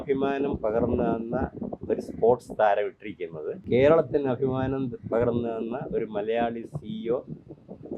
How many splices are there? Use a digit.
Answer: 1